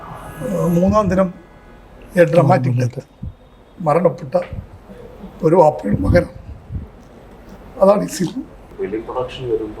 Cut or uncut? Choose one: cut